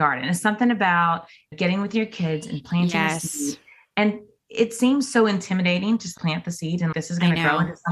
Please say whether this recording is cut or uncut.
cut